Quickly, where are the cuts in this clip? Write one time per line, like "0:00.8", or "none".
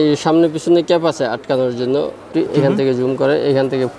0:02.3

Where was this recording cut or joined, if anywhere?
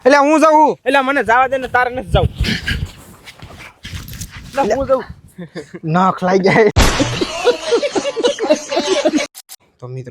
0:06.7
0:09.2

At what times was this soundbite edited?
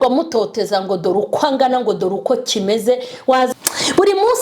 0:03.5

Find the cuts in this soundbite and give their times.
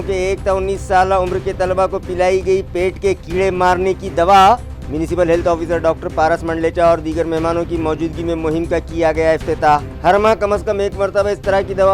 none

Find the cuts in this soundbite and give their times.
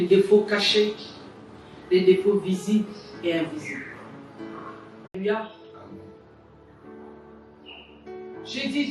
0:05.2

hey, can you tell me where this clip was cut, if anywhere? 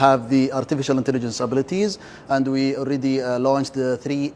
none

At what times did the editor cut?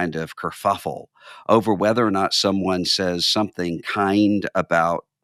none

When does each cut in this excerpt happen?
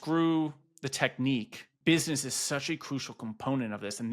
0:01.6

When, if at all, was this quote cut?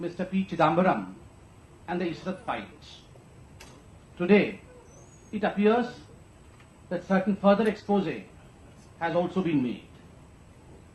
0:09.0

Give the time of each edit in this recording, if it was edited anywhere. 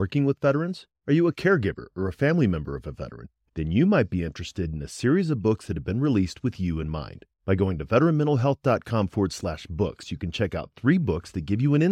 none

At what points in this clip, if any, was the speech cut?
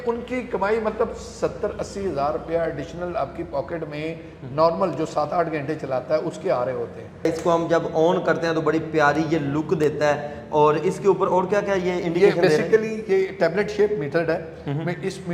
0:07.2

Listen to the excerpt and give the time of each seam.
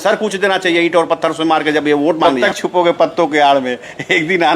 0:02.3

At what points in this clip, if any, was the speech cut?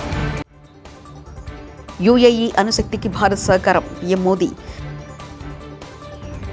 none

